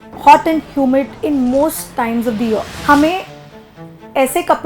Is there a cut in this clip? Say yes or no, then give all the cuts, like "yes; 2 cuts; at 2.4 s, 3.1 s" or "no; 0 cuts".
yes; 2 cuts; at 1.1 s, 2.7 s